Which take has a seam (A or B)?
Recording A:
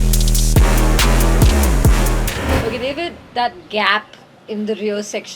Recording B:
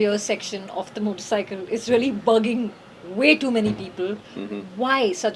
A